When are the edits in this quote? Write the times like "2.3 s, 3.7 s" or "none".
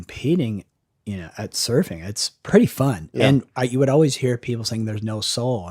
2.3 s